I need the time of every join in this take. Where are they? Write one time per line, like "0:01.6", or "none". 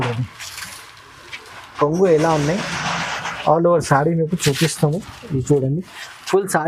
none